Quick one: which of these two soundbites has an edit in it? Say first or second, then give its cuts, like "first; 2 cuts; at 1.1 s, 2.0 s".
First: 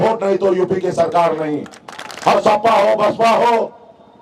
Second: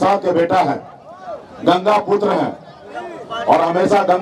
first; 1 cut; at 2.3 s